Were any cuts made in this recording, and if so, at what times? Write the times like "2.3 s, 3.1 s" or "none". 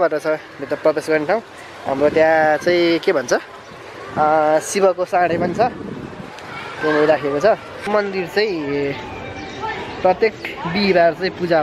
7.7 s